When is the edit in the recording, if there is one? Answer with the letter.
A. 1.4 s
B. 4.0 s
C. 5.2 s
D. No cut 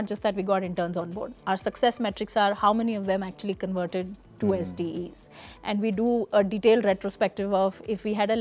D